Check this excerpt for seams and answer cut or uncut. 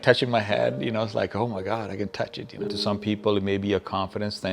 cut